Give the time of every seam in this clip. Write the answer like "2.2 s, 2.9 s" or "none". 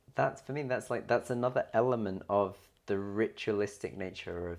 none

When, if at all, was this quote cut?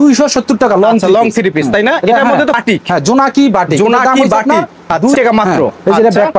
2.6 s, 5.2 s

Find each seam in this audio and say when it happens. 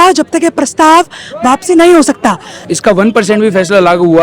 2.6 s

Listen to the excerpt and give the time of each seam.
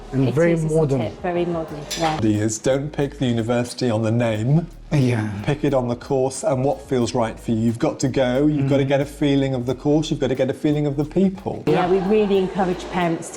2.2 s, 11.7 s

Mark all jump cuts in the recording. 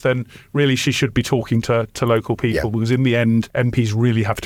none

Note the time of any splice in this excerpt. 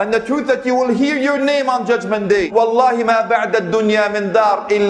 2.5 s

